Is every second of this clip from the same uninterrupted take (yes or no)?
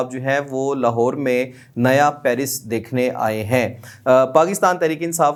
yes